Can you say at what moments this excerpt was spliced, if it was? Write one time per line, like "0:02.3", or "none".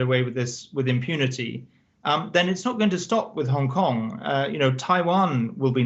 none